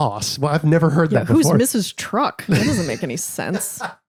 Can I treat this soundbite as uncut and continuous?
yes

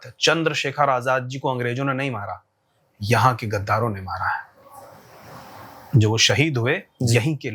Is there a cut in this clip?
no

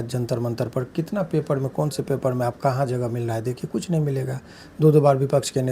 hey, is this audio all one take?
yes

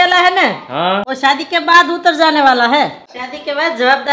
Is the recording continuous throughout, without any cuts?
no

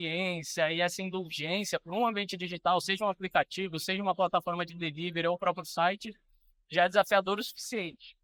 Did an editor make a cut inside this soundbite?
no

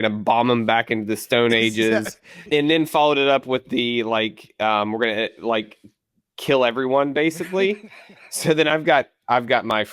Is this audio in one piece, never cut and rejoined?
no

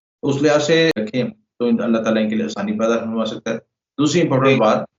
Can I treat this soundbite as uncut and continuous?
no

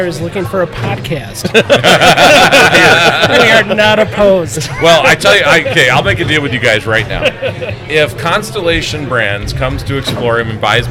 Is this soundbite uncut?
yes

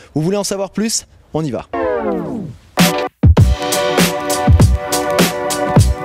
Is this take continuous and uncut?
no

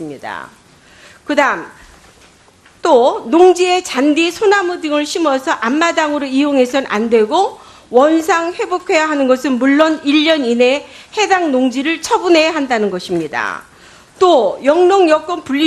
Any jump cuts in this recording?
no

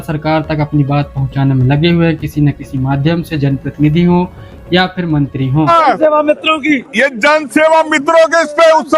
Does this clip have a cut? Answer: yes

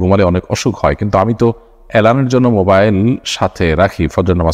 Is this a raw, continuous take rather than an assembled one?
yes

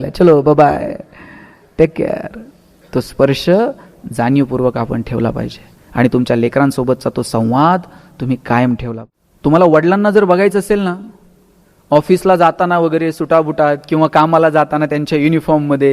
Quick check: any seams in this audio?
yes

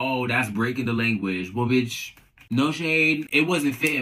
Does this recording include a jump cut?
no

